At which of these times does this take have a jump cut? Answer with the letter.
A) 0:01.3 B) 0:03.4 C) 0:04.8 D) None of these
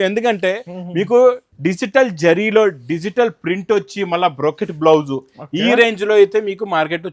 D